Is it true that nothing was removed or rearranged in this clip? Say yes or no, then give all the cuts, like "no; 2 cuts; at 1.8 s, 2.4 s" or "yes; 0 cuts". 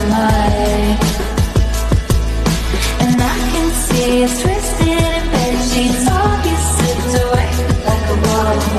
yes; 0 cuts